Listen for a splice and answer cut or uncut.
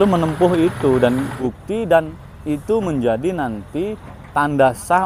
cut